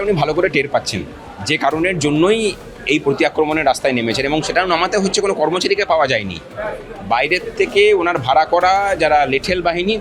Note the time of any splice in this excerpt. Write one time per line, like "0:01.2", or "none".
none